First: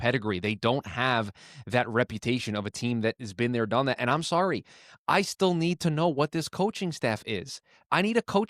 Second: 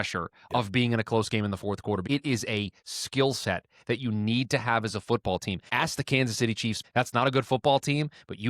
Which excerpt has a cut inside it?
second; 3 cuts; at 2.0 s, 5.6 s, 6.8 s

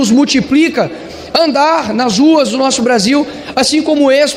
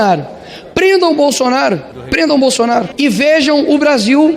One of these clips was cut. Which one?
second; 2 cuts; at 1.9 s, 2.9 s

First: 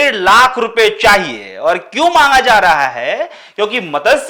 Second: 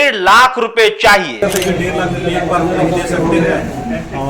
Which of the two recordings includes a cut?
second; 1 cut; at 1.4 s

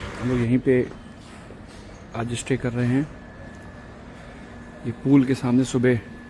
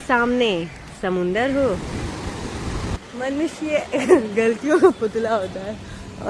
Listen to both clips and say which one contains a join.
second; 1 cut; at 3.1 s

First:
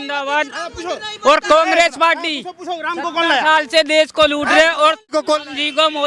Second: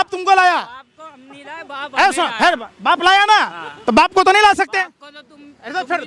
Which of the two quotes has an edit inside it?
first; 1 cut; at 5.2 s

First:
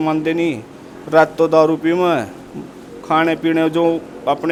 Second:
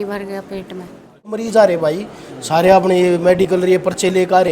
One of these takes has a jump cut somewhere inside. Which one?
second; 1 cut; at 1.4 s

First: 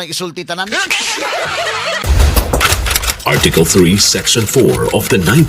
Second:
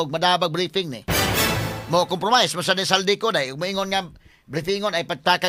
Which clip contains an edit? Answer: first; 1 cut; at 2.0 s

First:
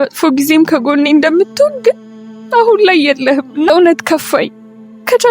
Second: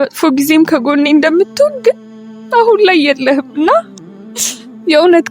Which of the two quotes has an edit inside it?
first; 1 cut; at 3.7 s

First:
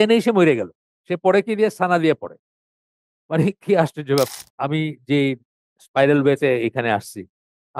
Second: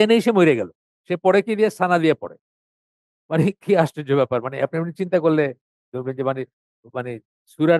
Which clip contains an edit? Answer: first; 1 cut; at 4.3 s

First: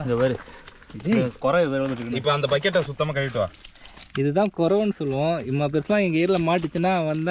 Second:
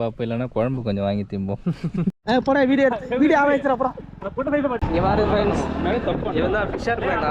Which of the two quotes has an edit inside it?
second; 2 cuts; at 2.2 s, 4.8 s

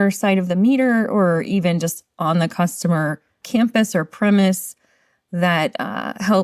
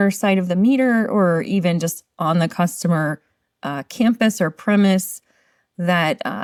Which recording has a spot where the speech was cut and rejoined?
first; 1 cut; at 3.3 s

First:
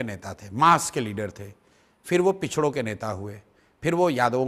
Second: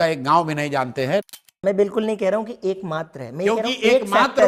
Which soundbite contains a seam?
second; 1 cut; at 1.4 s

